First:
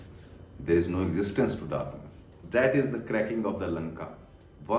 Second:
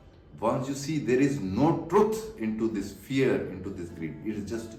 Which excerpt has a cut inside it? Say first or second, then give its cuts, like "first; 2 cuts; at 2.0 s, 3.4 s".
first; 1 cut; at 2.4 s